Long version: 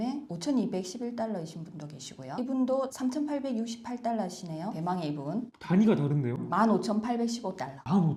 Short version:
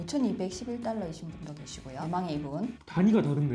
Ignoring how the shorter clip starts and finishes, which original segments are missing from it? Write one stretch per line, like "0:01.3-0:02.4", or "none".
0:02.3-0:04.7

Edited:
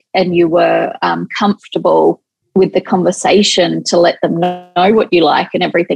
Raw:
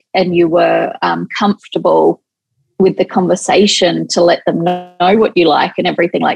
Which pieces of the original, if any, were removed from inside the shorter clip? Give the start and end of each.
0:02.3-0:02.6

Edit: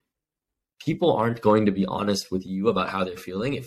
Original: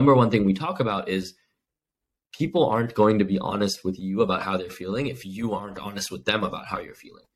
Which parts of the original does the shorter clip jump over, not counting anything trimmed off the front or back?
none

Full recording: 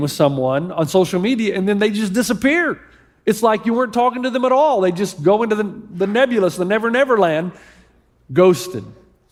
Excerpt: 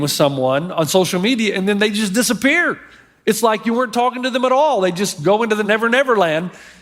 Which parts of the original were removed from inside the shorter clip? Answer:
0:05.7-0:06.7

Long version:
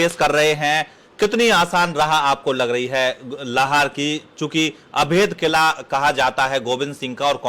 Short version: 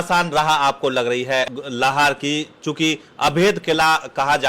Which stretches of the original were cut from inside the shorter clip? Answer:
0:03.1-0:03.2

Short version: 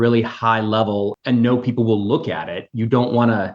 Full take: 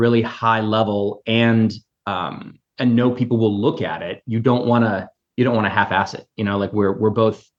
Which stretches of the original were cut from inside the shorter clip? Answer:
0:01.2-0:02.7

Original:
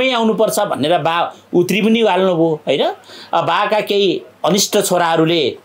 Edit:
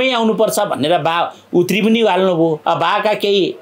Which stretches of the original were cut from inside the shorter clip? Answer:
0:02.6-0:03.3

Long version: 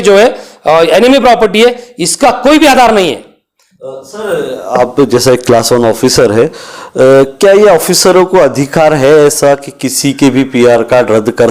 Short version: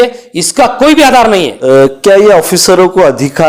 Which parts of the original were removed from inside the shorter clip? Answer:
0:03.2-0:06.9

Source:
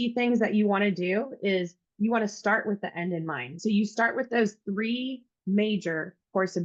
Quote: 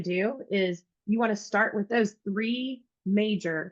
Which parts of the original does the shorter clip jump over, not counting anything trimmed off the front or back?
0:02.8-0:04.3

